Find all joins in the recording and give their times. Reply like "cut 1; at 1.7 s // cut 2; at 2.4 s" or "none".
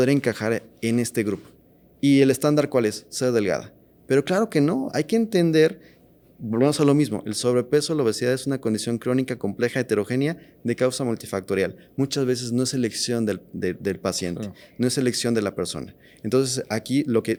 none

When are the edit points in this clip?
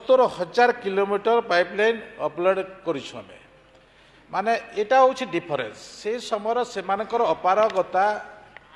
none

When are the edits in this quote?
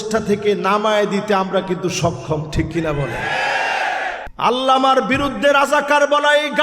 cut 1; at 4.3 s

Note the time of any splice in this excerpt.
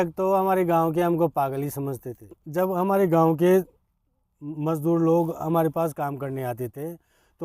cut 1; at 2.3 s

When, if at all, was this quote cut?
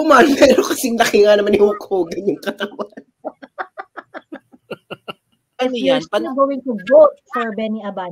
cut 1; at 5.6 s

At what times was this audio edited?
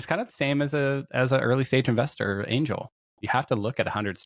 none

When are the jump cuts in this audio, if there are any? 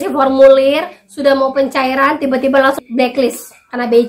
cut 1; at 2.8 s

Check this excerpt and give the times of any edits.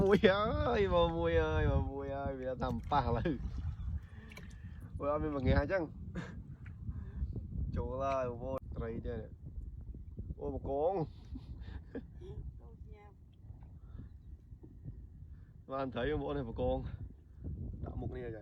cut 1; at 8.6 s

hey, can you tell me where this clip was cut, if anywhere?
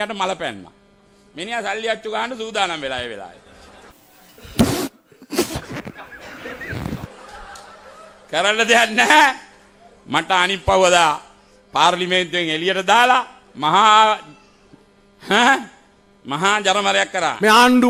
none

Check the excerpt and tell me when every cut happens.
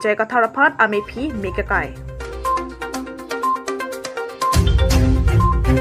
none

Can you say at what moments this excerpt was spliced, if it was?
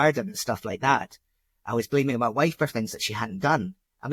none

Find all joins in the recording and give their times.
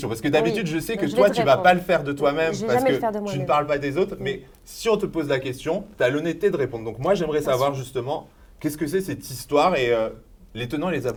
none

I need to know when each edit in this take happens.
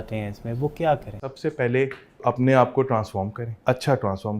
cut 1; at 1.3 s // cut 2; at 2.2 s // cut 3; at 3.4 s

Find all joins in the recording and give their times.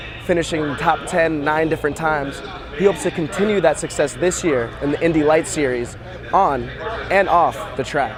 none

